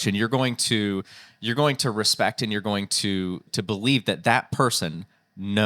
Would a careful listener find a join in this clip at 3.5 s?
yes; 1 cut; at 3.5 s

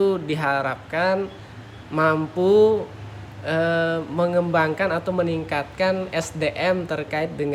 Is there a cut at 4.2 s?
no; 0 cuts

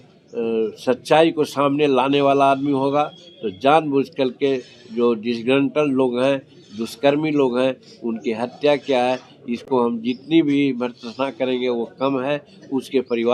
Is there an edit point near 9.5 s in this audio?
no; 0 cuts

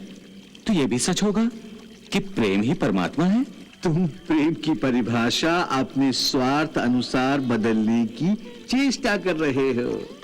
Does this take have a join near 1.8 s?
no; 1 cut; at 3.6 s

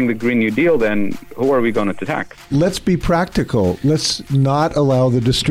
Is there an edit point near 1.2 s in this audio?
no; 1 cut; at 2.4 s

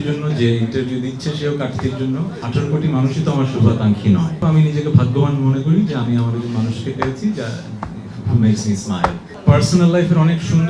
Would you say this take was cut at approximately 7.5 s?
no; 3 cuts; at 2.5 s, 4.3 s, 9.3 s

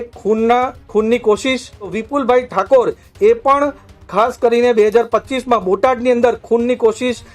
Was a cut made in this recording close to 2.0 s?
yes; 1 cut; at 2.0 s

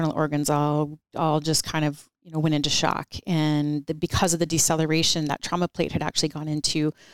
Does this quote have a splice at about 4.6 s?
no; 2 cuts; at 1.0 s, 2.1 s

